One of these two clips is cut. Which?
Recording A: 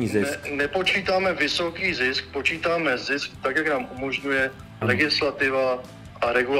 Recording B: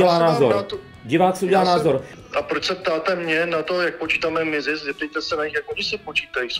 B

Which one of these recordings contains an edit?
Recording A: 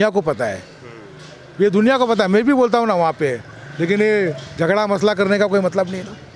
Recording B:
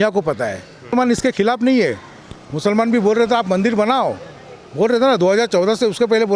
B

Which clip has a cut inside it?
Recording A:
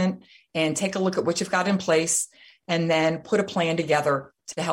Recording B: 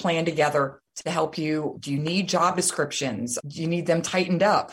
B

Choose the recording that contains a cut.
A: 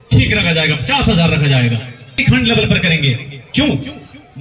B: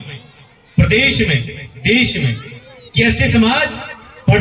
A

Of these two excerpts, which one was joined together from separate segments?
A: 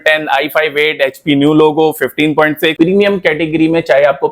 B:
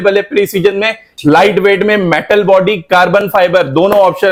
A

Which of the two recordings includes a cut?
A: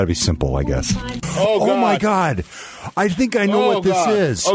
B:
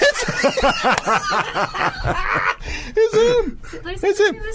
A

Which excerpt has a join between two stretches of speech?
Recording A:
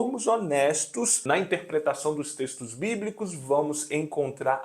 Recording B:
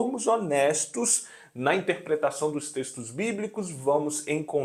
A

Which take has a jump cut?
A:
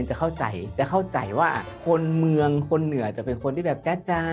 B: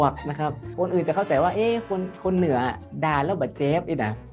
A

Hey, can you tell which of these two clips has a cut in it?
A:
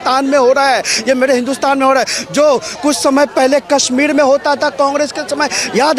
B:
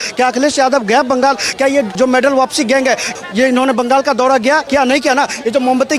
B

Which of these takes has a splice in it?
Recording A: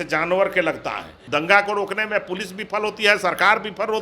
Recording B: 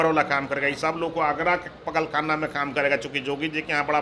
A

